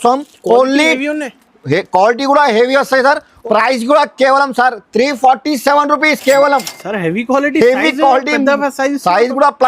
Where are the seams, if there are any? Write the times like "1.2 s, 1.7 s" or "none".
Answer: 3.3 s